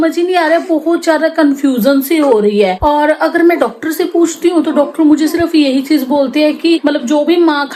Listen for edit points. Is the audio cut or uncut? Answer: uncut